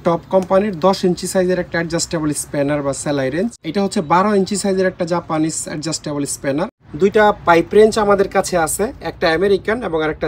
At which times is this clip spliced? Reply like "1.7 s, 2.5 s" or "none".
3.6 s, 6.8 s